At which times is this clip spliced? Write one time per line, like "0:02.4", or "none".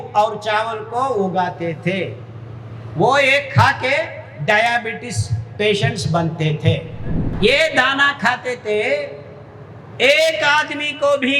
0:07.2